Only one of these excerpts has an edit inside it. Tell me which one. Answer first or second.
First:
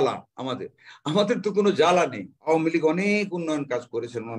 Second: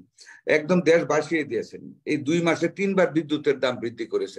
first